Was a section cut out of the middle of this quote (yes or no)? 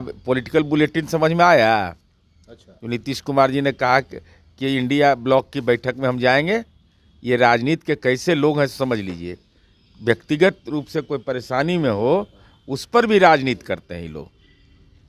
no